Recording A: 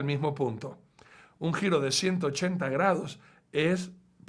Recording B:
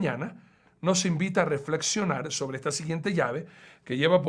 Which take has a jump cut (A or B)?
A